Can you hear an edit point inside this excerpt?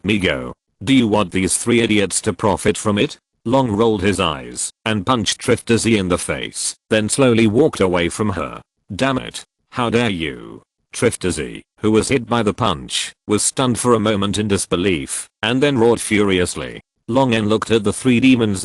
no; 0 cuts

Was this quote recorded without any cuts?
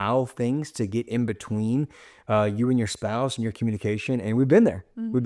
yes; 0 cuts

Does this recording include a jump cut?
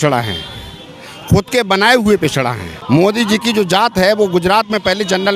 yes; 1 cut; at 2.7 s

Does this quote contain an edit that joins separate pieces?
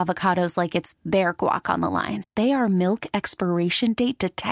no; 0 cuts

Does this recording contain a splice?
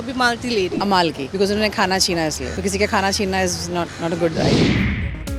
yes; 3 cuts; at 0.9 s, 2.5 s, 4.4 s

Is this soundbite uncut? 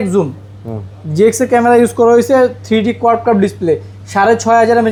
yes; 0 cuts

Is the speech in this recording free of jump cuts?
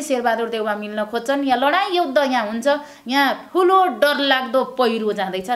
yes; 0 cuts

